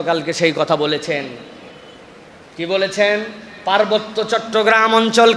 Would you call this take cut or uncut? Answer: uncut